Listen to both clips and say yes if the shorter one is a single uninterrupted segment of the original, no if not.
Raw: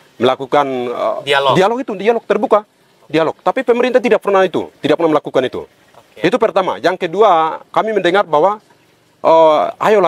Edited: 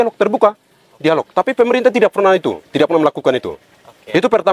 yes